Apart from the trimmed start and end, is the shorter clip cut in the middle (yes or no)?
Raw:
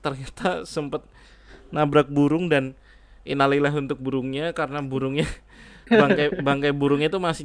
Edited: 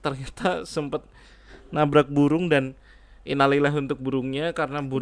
no